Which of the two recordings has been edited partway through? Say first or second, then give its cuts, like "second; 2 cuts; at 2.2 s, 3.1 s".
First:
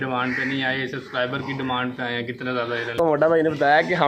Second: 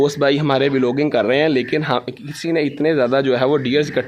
first; 1 cut; at 3.0 s